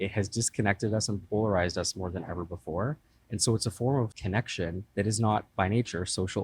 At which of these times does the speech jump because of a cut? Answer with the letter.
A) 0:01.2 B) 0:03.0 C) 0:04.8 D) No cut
C